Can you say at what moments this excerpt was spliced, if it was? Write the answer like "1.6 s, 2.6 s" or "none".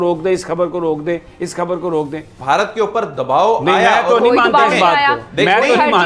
2.3 s